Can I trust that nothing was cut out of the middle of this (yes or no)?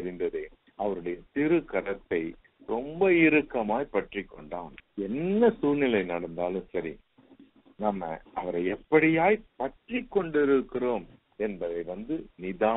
no